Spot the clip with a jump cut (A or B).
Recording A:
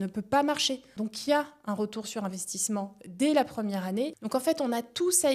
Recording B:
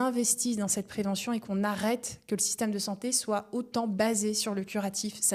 A